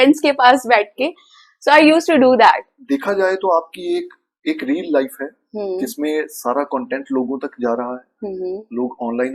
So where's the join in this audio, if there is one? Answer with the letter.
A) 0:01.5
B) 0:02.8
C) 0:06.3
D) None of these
B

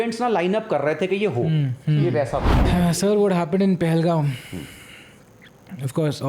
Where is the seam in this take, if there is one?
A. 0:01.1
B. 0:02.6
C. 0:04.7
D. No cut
B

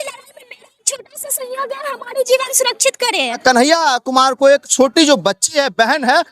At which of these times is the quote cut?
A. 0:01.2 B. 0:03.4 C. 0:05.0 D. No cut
B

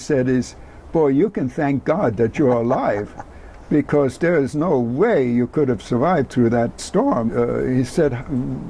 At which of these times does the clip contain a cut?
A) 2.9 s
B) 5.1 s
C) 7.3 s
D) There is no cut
C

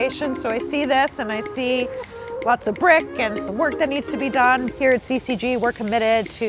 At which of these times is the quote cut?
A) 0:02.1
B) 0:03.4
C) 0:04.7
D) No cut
C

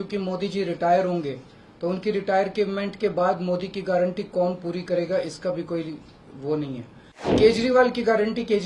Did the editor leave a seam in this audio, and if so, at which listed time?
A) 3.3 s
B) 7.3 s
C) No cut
B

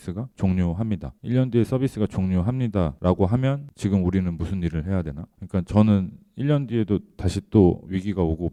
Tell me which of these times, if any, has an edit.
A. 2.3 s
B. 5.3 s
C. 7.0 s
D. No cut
D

